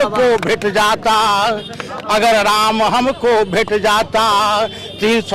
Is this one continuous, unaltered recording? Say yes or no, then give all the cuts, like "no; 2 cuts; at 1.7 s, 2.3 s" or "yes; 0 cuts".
yes; 0 cuts